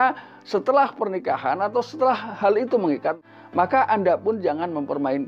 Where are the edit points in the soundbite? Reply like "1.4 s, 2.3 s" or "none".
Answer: none